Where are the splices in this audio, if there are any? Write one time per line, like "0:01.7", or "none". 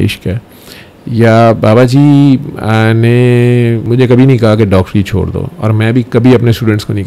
0:03.8